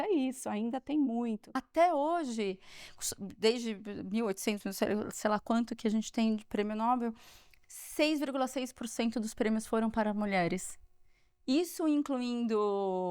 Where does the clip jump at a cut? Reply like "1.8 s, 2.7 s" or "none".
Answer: 1.6 s